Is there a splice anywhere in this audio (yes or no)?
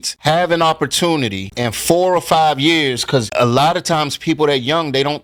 no